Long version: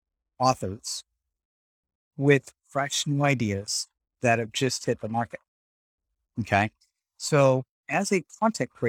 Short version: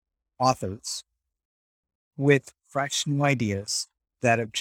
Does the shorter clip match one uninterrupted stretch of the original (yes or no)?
yes